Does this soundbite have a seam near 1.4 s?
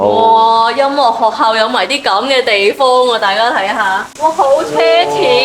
no; 1 cut; at 4.1 s

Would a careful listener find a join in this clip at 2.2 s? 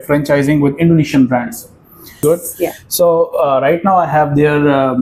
yes; 1 cut; at 2.2 s

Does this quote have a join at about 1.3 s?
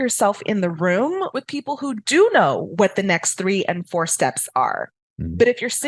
yes; 1 cut; at 1.3 s

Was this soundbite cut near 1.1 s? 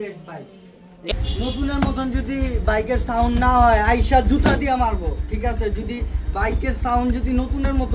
yes; 1 cut; at 1.1 s

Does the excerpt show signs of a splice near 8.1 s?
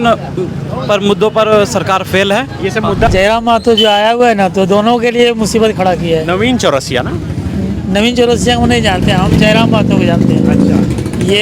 no; 1 cut; at 3.1 s

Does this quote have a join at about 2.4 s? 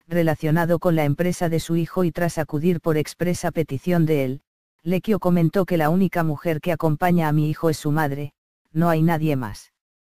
no; 1 cut; at 6.0 s

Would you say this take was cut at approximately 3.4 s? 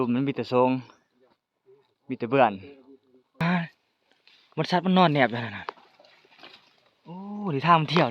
yes; 1 cut; at 3.4 s

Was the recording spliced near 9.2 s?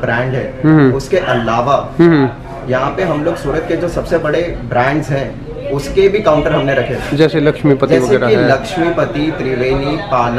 no; 0 cuts

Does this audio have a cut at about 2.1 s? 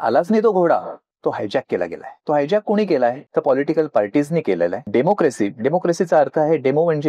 yes; 3 cuts; at 2.1 s, 3.2 s, 4.8 s

